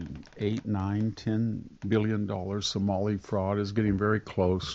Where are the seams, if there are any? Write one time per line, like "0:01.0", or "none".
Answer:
0:01.7